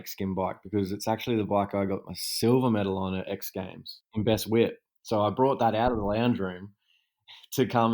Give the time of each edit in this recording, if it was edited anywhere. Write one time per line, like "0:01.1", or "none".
0:04.1